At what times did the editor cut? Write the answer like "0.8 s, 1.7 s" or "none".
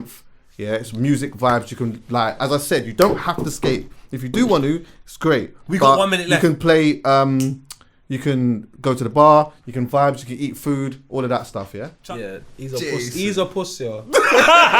11.9 s